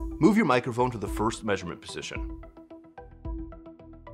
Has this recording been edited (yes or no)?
yes